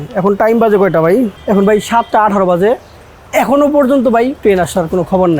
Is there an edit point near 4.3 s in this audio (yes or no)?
yes